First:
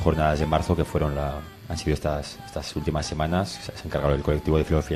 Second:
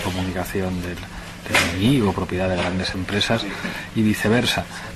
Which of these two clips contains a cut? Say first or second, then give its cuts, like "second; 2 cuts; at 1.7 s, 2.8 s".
first; 1 cut; at 4.0 s